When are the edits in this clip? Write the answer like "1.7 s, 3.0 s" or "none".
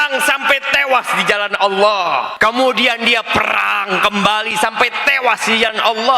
2.3 s